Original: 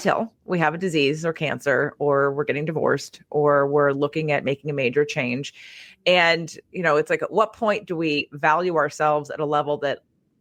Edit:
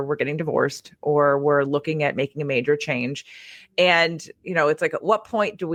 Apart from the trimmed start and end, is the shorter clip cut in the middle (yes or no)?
no